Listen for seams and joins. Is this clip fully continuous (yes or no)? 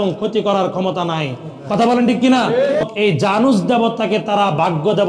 no